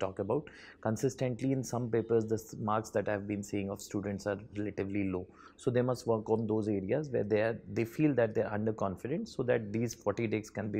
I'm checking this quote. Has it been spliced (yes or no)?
no